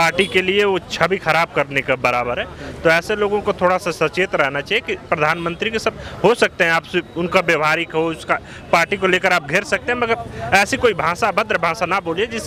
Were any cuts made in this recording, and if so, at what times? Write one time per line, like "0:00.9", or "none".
none